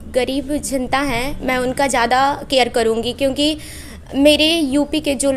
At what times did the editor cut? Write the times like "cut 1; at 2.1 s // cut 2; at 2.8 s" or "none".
none